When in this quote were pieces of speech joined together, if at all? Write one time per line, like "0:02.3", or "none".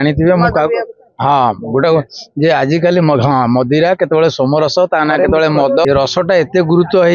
0:05.8